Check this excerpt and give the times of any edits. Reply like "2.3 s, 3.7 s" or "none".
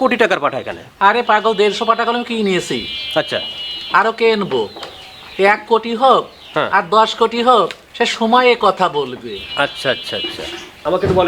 none